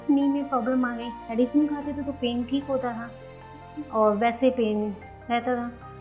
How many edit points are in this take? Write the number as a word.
one